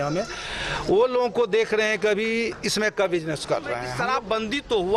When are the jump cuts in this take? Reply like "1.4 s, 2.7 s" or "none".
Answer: 3.9 s